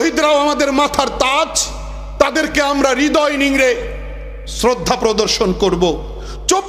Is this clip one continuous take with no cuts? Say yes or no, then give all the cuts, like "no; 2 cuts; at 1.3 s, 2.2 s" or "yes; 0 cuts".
yes; 0 cuts